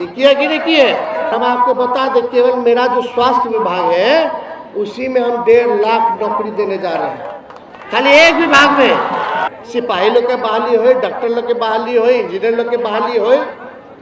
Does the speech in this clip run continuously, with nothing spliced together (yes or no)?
no